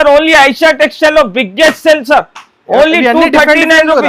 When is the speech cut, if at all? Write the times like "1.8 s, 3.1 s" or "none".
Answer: none